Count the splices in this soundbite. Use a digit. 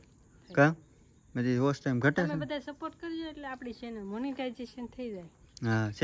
0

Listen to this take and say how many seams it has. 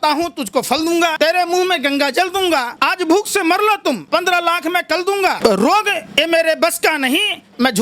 4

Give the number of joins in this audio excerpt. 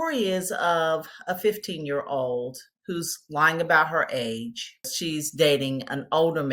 1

